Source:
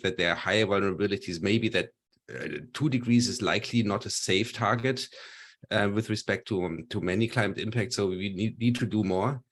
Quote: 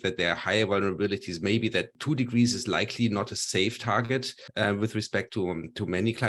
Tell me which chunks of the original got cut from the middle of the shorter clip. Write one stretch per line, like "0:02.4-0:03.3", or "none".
0:01.9-0:02.7
0:05.1-0:05.5